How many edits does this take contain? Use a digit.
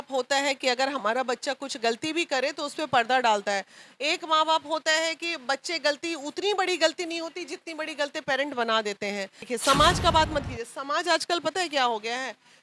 1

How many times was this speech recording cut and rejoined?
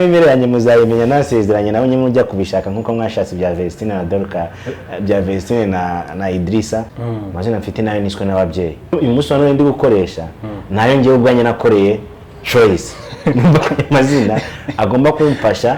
2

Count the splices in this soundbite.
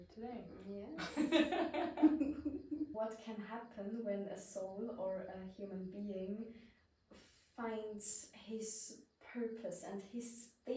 1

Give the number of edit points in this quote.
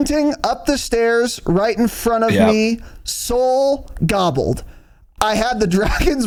0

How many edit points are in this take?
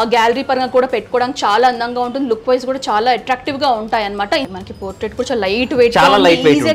1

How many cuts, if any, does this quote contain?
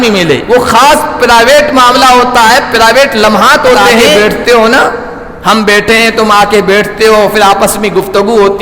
1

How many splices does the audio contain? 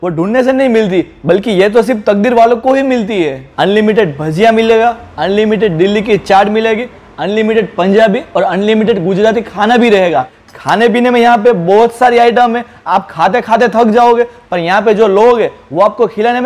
2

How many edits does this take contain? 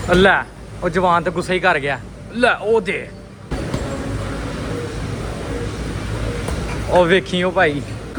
0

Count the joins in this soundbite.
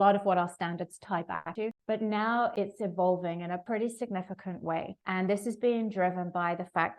1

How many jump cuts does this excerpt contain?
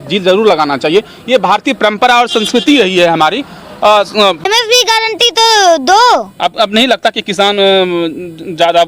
1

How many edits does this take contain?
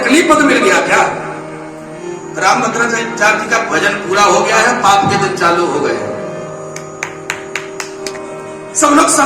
2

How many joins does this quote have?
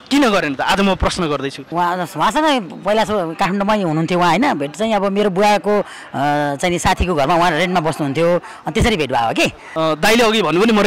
2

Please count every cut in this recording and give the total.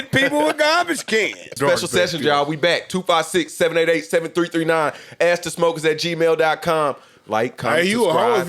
1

